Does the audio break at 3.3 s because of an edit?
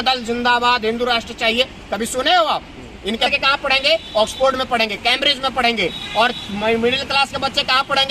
yes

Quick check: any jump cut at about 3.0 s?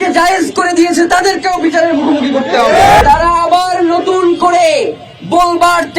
yes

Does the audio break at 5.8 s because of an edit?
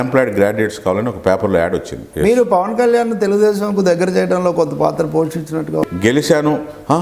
yes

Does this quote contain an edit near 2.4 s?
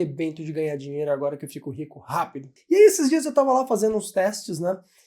yes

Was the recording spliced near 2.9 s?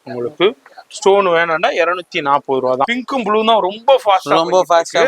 yes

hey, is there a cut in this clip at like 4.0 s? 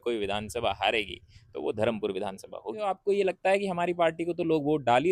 no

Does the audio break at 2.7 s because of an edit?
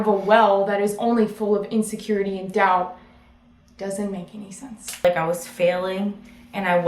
no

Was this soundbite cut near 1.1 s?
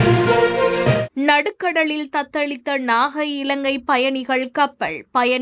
yes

